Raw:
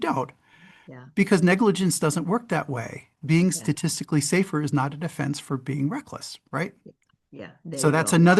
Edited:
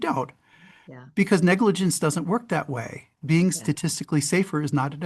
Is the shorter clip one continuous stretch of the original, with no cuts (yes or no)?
yes